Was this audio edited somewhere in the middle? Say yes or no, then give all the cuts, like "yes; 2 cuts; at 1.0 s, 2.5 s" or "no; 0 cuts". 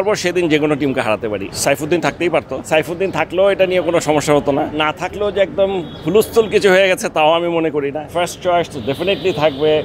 yes; 4 cuts; at 1.5 s, 2.7 s, 4.8 s, 8.1 s